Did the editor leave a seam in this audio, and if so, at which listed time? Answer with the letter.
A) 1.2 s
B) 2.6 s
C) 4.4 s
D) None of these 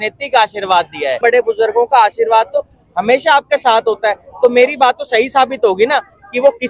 A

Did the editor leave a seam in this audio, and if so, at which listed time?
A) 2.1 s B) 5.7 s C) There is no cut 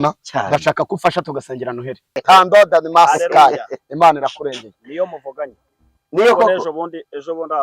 A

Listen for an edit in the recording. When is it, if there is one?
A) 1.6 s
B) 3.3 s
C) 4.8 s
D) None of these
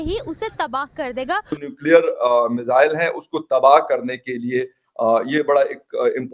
A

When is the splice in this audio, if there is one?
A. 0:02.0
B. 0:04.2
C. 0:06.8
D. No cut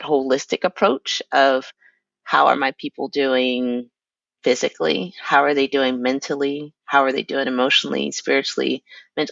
D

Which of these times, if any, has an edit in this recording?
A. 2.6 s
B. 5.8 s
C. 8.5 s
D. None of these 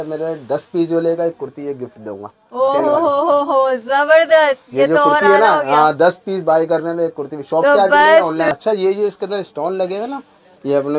C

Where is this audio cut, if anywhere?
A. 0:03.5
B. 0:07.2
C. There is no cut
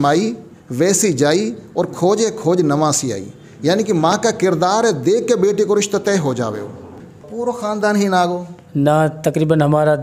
B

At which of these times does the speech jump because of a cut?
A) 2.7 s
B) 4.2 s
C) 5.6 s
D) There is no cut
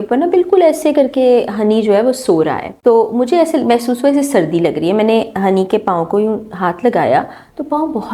A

